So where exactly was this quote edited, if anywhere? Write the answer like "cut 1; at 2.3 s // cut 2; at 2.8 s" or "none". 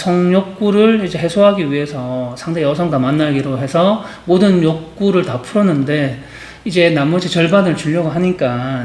none